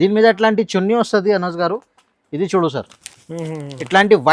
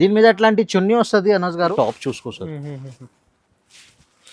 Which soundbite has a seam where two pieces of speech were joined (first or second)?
second